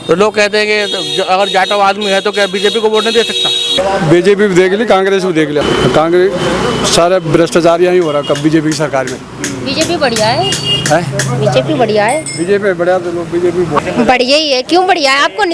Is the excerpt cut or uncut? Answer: cut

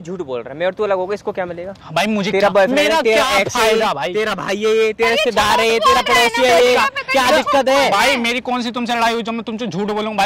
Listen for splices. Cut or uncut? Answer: uncut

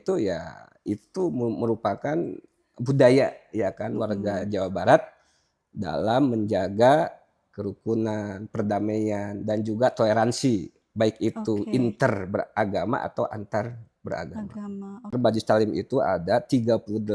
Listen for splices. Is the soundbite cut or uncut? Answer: cut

